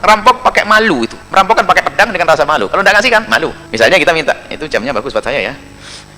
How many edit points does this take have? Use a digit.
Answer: 2